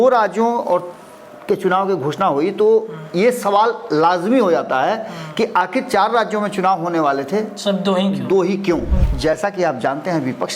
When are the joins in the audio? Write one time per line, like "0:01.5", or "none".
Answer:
0:09.0